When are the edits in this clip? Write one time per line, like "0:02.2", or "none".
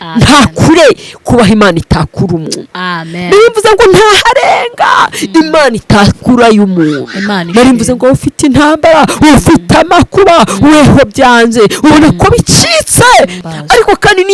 0:13.4